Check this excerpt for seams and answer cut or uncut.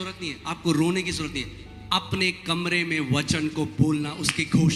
uncut